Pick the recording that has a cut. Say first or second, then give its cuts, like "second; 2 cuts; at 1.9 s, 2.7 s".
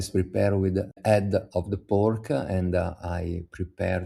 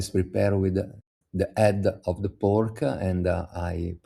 first; 1 cut; at 1.0 s